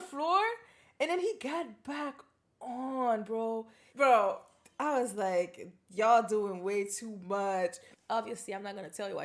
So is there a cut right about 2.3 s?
no; 2 cuts; at 3.8 s, 7.9 s

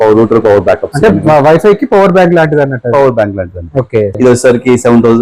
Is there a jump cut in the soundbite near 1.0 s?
no; 1 cut; at 4.2 s

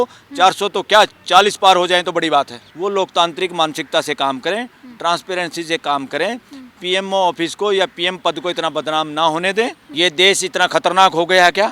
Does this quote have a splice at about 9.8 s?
yes; 2 cuts; at 2.6 s, 9.8 s

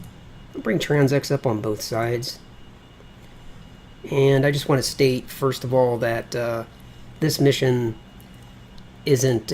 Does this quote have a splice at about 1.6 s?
no; 1 cut; at 5.4 s

